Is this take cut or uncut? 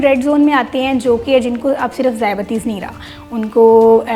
uncut